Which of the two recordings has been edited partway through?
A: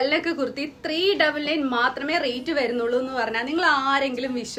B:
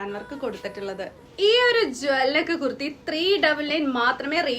B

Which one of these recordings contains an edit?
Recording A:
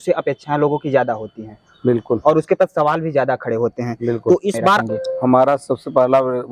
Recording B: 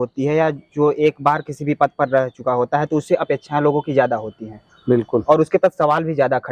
A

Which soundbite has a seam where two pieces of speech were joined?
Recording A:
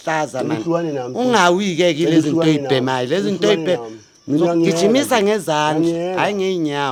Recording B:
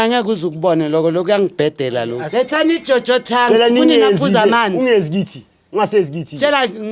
B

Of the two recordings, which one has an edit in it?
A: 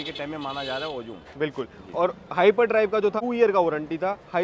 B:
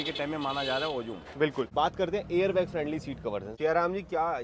B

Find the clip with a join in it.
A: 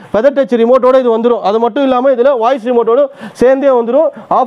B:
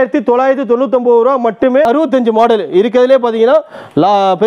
B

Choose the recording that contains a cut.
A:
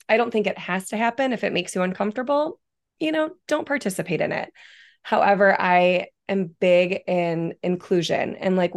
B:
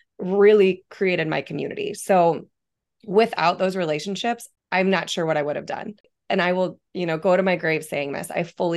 B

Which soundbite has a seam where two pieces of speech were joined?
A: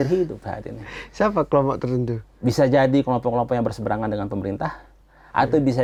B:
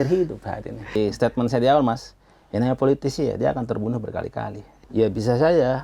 B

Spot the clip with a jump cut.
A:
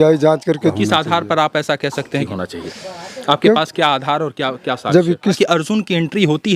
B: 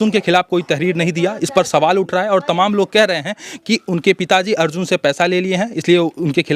A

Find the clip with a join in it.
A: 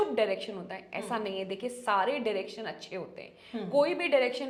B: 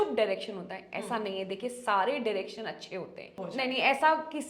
B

